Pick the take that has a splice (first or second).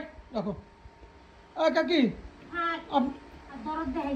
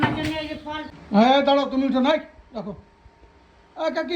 second